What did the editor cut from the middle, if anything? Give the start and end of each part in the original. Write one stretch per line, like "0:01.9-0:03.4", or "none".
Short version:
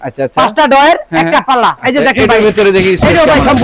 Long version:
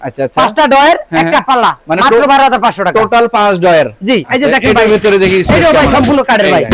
0:01.8-0:04.3

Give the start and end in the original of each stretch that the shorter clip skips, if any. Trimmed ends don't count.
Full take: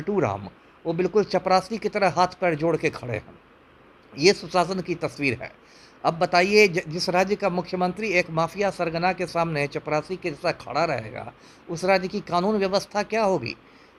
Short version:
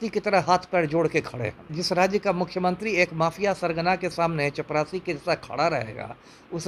0:03.4-0:06.9

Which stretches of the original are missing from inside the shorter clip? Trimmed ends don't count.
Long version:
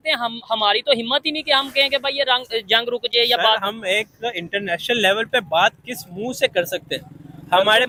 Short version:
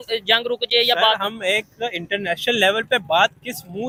none

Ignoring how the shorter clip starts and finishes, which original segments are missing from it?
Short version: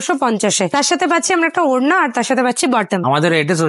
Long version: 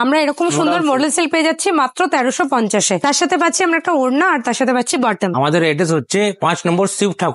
none

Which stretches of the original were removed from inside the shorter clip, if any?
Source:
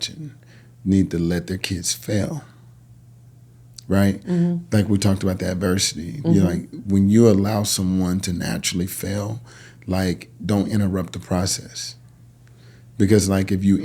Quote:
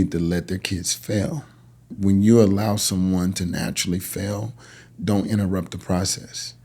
0:02.8-0:06.7
0:09.7-0:10.3

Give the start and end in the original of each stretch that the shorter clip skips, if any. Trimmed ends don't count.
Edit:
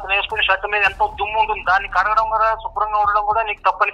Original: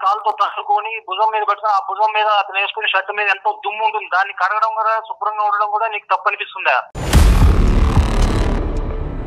none

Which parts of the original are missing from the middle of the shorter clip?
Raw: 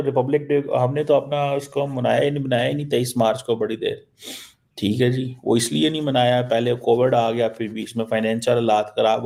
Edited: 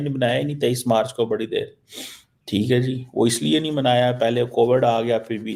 none

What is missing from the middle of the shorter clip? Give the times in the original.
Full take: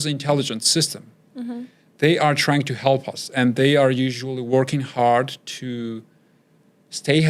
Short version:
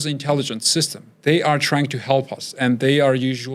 0:01.0-0:01.8

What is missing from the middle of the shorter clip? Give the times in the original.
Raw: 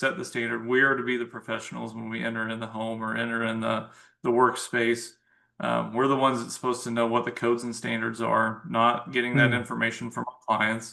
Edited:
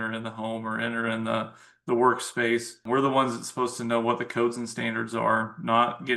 0:05.2-0:05.9

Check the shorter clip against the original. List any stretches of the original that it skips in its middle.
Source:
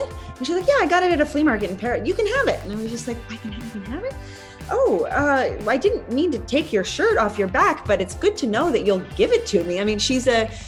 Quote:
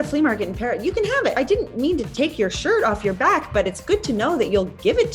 0:02.6-0:05.7

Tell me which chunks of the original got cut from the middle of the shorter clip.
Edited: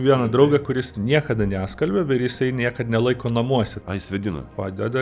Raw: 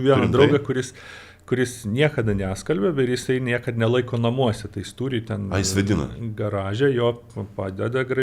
0:00.9-0:01.8
0:05.0-0:07.1

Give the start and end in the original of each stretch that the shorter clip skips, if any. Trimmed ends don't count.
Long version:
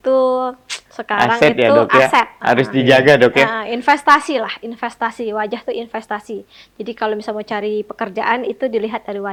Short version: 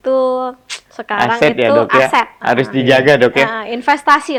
none

